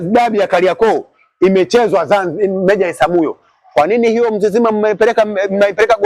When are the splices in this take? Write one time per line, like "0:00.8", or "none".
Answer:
none